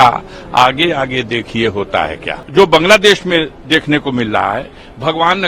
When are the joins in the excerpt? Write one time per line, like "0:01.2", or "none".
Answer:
0:02.4